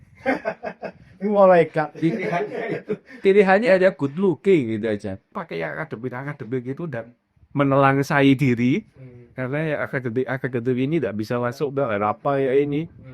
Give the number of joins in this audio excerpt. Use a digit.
1